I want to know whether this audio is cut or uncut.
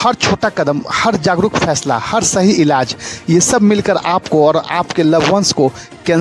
uncut